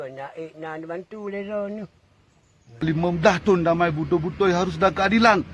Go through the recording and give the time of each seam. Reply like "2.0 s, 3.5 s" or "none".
2.8 s